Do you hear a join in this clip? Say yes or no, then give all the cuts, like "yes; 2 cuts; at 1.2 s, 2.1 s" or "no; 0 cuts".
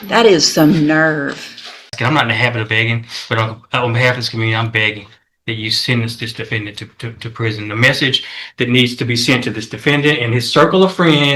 yes; 1 cut; at 1.9 s